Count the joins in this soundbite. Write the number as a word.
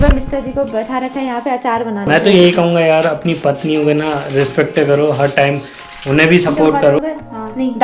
two